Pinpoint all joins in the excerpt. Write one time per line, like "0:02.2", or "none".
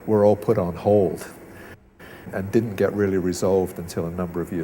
0:02.2